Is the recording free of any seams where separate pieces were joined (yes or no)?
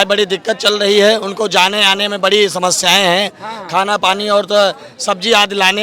yes